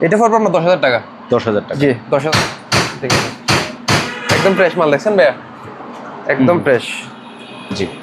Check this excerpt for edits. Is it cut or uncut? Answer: cut